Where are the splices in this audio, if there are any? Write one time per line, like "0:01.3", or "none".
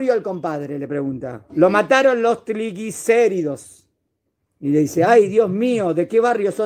none